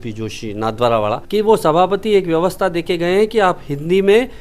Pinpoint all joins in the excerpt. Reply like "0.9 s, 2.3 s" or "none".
1.2 s